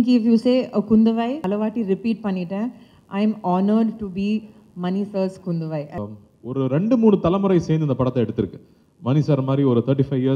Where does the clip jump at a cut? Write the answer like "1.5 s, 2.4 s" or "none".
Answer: 1.4 s, 5.9 s